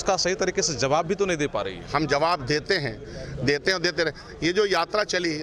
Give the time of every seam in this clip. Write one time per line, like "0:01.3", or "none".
none